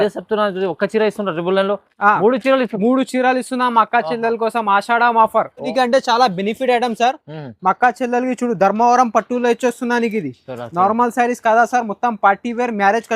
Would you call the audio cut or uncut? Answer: cut